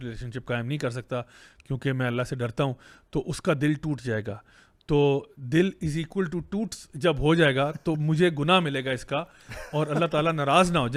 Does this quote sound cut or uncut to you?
uncut